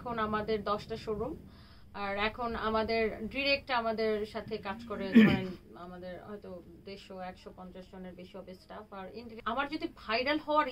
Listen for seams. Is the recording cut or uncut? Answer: cut